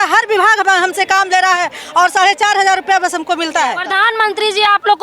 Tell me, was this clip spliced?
yes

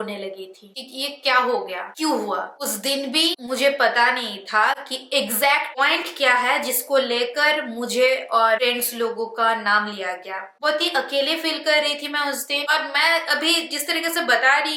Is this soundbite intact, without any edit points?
yes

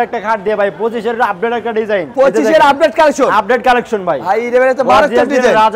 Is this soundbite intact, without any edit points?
yes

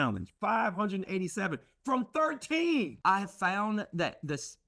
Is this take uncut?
no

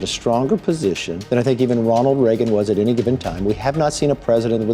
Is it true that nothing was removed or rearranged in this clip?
no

